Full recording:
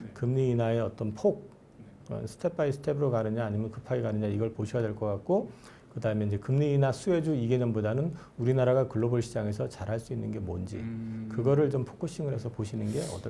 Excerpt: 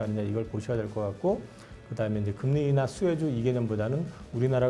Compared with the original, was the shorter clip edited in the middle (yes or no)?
no